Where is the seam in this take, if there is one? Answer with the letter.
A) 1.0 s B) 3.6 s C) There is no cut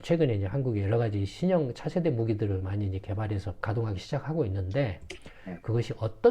B